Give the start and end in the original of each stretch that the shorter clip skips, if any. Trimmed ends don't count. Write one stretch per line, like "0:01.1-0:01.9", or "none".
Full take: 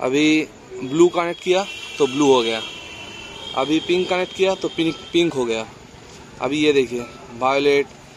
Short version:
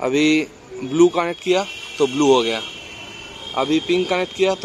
none